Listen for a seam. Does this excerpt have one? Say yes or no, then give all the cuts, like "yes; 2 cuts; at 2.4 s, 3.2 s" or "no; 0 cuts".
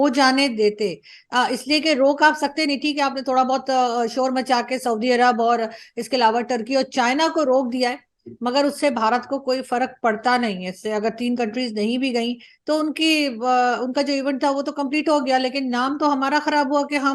no; 0 cuts